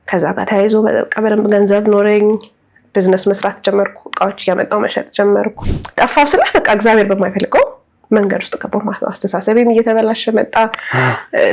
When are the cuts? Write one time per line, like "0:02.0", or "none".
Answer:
0:05.6